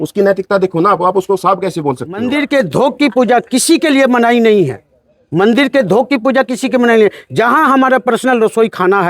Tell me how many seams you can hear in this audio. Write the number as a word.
one